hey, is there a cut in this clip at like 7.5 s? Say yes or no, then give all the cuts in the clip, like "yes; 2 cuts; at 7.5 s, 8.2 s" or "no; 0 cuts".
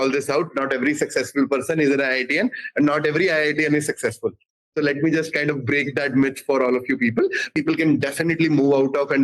yes; 1 cut; at 7.5 s